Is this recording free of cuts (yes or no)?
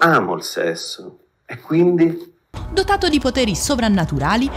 no